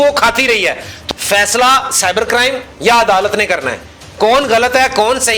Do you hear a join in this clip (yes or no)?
yes